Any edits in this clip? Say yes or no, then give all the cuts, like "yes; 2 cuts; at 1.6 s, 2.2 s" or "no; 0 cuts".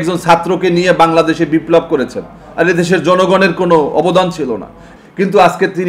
yes; 1 cut; at 4.8 s